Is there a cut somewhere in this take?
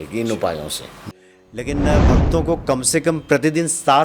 yes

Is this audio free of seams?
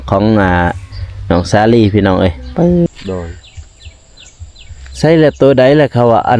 no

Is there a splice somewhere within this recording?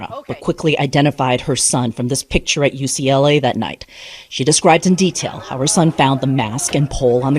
yes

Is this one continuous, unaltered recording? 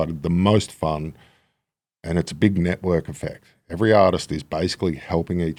yes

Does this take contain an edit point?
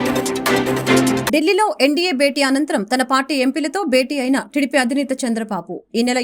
yes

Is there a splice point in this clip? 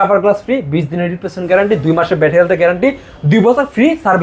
no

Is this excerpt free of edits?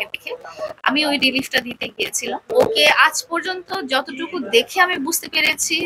no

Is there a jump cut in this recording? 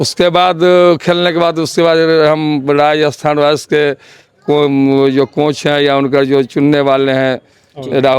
no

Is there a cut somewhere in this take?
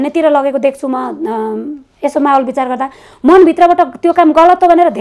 no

